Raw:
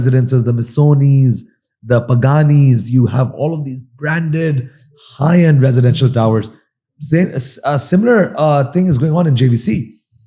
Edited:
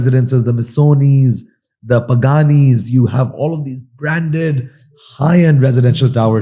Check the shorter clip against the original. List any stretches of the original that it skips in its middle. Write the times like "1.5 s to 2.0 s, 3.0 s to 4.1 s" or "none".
none